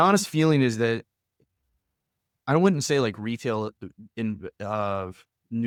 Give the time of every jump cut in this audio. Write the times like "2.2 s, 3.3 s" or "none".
none